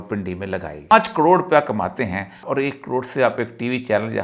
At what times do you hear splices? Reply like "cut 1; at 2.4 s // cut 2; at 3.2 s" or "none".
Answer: cut 1; at 0.9 s // cut 2; at 2.4 s